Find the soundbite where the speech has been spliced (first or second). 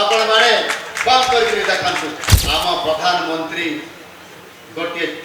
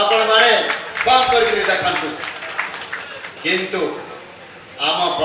first